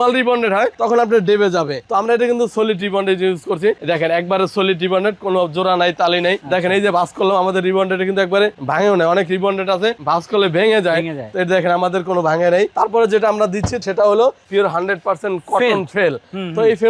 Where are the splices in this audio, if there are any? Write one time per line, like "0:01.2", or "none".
none